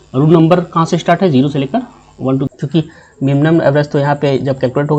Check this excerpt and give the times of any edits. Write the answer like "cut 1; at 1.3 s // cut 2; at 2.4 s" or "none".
cut 1; at 2.5 s